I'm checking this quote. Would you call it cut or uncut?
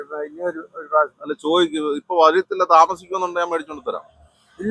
uncut